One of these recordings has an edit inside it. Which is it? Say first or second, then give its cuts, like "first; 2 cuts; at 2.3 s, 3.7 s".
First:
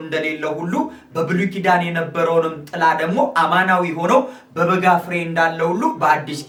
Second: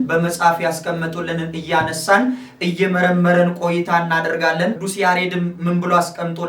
second; 1 cut; at 4.8 s